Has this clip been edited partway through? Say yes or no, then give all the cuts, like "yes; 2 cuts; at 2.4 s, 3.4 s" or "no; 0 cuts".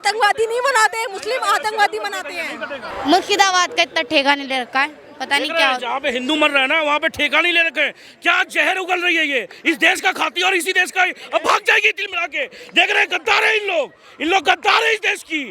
yes; 1 cut; at 2.9 s